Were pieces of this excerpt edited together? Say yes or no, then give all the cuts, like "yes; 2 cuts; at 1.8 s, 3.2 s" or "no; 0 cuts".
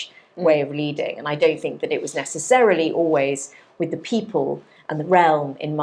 no; 0 cuts